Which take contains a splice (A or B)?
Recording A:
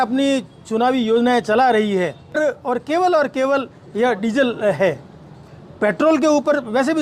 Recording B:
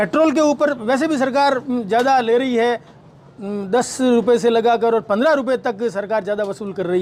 A